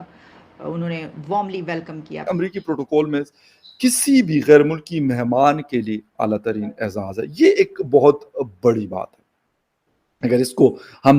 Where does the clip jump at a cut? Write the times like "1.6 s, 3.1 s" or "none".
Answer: 2.1 s